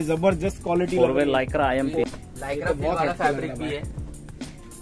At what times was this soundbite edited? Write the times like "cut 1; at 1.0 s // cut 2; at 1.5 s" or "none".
cut 1; at 2.0 s